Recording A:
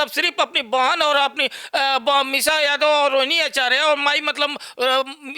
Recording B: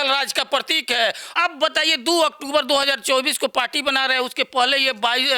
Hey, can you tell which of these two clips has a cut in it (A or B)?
B